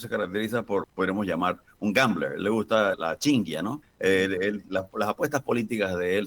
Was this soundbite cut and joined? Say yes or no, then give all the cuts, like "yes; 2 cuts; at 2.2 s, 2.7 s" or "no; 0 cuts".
yes; 3 cuts; at 0.9 s, 3.0 s, 3.9 s